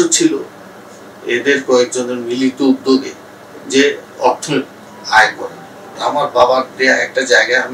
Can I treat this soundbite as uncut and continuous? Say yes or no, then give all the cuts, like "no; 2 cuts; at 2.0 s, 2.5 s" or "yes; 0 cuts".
no; 1 cut; at 6.0 s